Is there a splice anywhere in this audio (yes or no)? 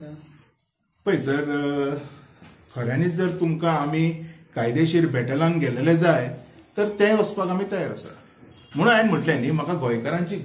no